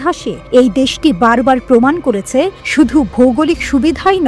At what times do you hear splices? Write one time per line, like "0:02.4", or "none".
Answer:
none

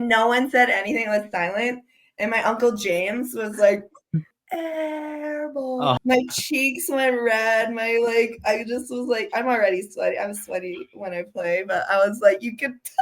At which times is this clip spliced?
0:04.4
0:05.9

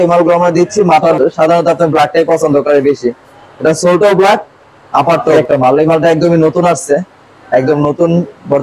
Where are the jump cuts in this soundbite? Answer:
0:01.0
0:05.3

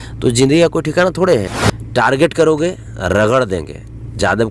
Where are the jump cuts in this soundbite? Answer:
0:01.5

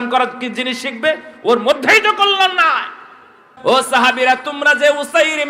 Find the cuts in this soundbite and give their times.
0:03.5

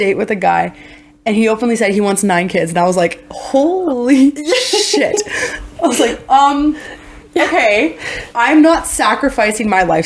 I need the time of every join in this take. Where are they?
none

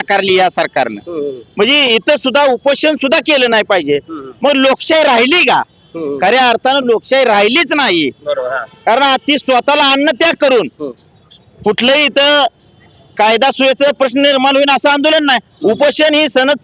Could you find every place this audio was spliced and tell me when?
none

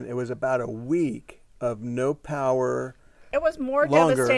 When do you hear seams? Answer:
0:03.3

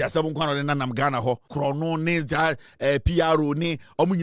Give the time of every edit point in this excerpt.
0:01.5

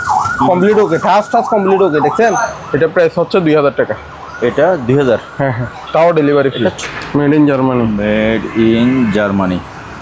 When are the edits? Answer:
0:02.4
0:06.8

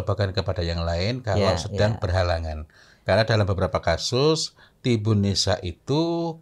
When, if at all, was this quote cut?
none

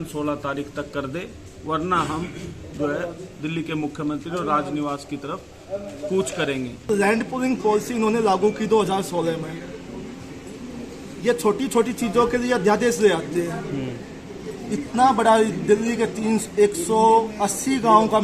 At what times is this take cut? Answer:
0:06.9

